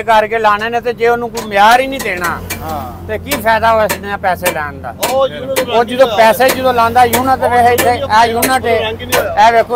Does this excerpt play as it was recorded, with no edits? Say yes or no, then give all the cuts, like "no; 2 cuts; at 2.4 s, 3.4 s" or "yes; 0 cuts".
yes; 0 cuts